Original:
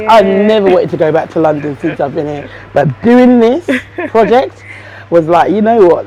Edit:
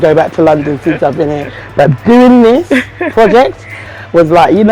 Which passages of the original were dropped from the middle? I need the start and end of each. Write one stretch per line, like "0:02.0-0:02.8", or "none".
none